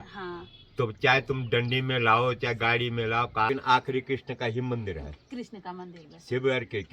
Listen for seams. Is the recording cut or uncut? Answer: cut